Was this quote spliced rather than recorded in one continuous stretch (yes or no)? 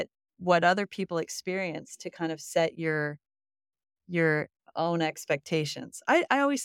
no